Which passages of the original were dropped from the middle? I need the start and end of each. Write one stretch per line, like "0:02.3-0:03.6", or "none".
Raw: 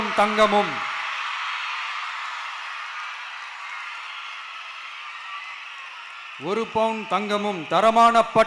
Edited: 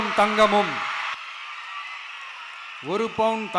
0:01.1-0:04.7